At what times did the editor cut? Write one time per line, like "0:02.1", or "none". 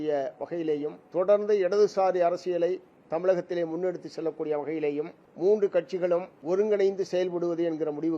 0:01.0
0:05.2
0:06.3

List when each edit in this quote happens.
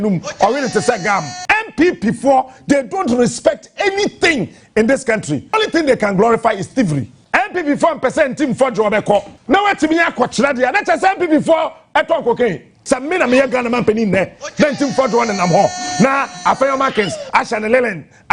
0:01.3
0:05.5
0:07.1
0:09.3
0:12.8

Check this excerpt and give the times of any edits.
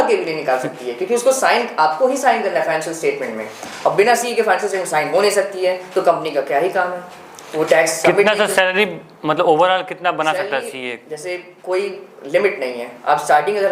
none

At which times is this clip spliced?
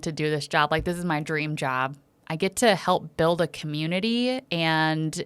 0:02.1

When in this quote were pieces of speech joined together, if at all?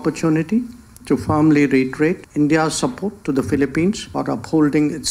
0:02.2
0:04.1

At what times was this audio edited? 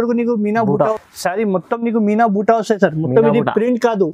0:00.9

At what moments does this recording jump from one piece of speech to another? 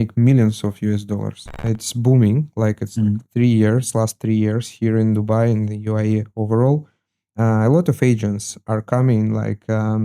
0:01.6

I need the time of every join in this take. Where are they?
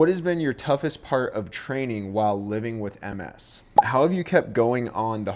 0:03.8

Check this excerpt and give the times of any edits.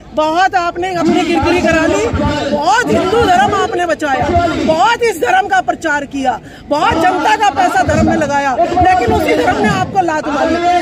none

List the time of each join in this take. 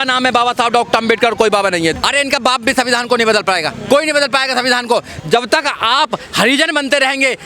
0:02.0
0:05.1

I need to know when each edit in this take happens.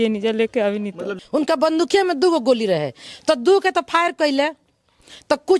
0:01.1

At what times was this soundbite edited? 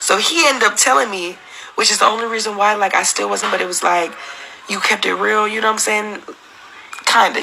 0:03.4

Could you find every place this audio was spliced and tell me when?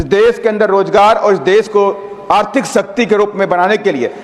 none

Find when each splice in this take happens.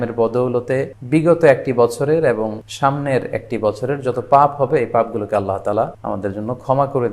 0:01.0
0:02.6
0:06.0

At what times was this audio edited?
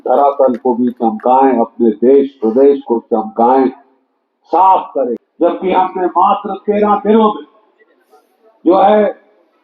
0:05.2

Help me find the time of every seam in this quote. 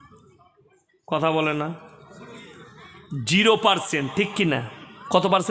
none

